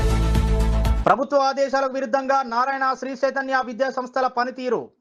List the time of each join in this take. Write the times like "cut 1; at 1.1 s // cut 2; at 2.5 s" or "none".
none